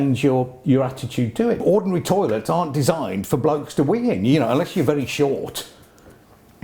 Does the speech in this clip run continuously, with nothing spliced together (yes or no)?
no